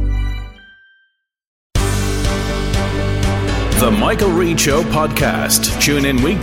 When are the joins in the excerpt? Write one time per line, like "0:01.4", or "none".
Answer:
0:01.7

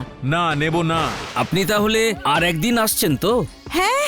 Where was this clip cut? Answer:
0:01.2

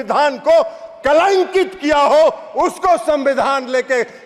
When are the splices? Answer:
none

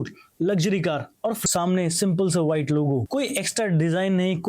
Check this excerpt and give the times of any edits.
0:01.4

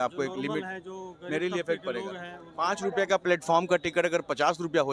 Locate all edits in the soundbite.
none

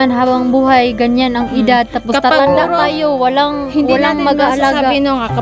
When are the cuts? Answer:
none

